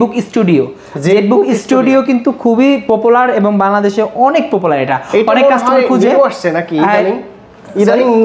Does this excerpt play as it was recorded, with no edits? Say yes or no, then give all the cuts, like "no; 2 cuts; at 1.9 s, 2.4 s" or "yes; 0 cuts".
yes; 0 cuts